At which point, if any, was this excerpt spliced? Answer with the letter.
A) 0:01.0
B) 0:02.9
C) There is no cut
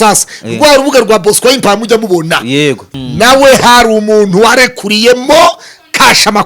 B